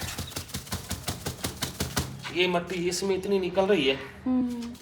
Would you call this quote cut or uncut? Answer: uncut